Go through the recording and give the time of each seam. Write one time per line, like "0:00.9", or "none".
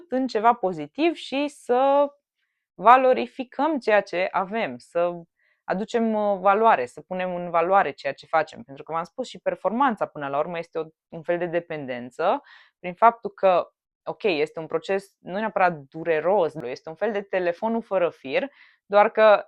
0:16.6